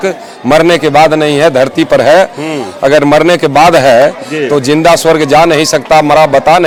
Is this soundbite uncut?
yes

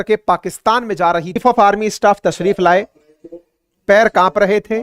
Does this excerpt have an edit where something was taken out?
yes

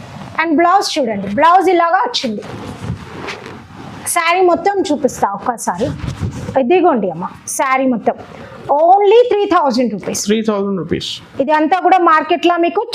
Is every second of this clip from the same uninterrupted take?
yes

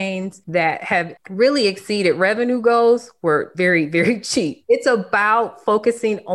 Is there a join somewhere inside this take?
yes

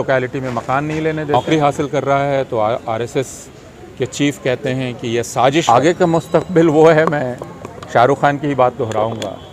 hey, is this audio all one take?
no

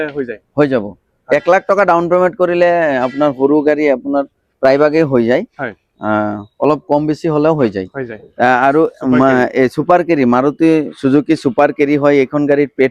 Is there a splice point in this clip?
no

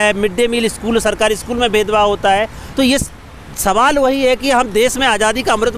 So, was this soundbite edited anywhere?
no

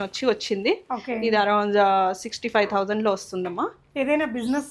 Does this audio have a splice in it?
no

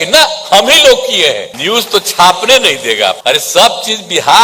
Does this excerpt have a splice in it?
yes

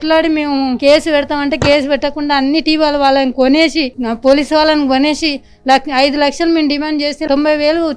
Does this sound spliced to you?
no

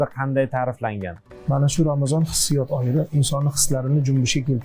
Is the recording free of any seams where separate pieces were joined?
no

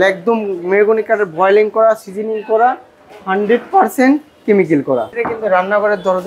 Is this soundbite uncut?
no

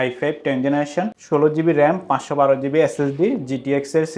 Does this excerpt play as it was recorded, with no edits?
yes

